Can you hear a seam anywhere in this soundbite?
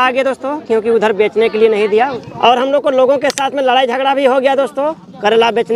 yes; 1 cut; at 2.2 s

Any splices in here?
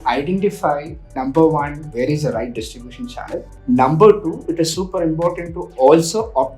yes; 2 cuts; at 1.8 s, 3.5 s

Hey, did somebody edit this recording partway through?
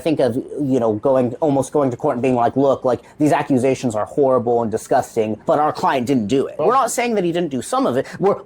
yes; 1 cut; at 6.6 s

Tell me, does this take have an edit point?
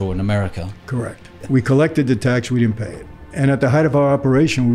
yes; 2 cuts; at 1.4 s, 3.3 s

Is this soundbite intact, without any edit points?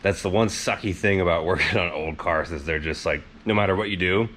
yes; 0 cuts

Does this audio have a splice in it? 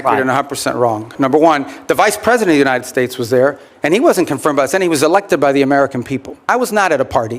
yes; 2 cuts; at 1.1 s, 6.4 s

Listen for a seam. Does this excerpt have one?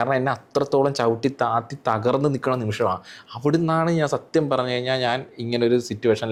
no; 0 cuts

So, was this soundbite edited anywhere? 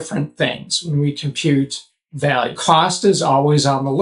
yes; 1 cut; at 2.6 s

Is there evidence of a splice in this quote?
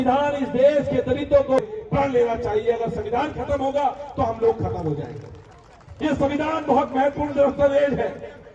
no; 0 cuts

